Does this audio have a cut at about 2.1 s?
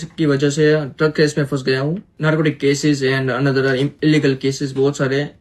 yes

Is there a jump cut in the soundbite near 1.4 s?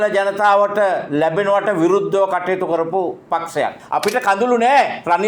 no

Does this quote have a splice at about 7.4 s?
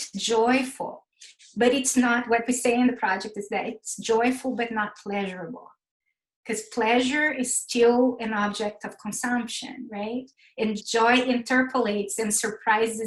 no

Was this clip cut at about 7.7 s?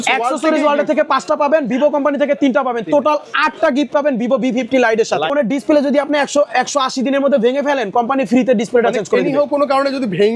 no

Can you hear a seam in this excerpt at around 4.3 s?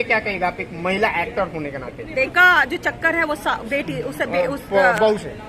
no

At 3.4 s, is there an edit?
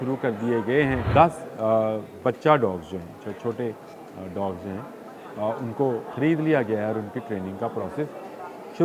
no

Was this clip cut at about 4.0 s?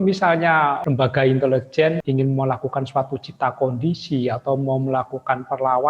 no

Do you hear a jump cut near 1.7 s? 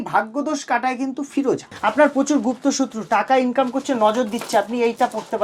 yes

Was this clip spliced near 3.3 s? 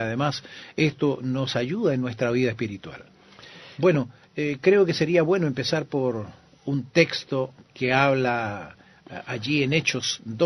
yes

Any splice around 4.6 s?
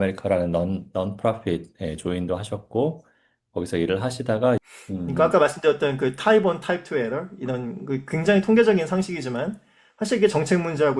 yes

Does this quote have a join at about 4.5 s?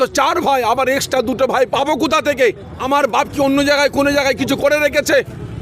no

